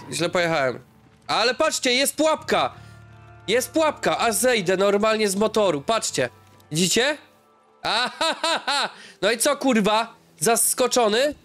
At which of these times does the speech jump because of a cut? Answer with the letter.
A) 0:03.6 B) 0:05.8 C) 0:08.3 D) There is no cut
D